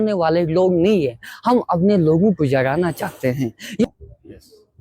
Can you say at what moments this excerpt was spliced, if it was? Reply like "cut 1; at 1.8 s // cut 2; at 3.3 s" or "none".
cut 1; at 3.8 s